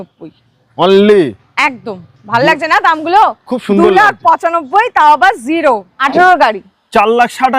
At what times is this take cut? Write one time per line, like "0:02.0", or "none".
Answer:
0:05.9